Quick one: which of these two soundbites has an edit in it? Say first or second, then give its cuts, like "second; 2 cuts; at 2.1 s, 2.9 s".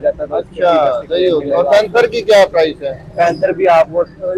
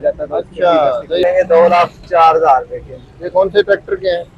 second; 1 cut; at 1.2 s